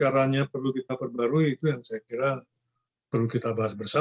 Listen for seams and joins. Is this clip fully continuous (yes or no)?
yes